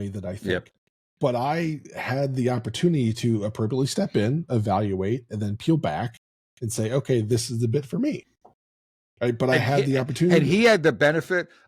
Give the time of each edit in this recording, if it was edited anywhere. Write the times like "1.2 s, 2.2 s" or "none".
none